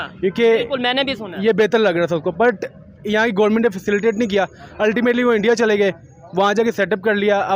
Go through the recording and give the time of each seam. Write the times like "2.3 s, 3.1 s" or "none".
none